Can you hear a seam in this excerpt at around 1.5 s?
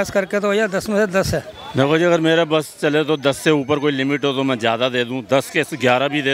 yes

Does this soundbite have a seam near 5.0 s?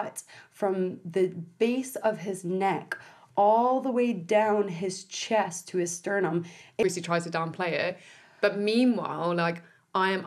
no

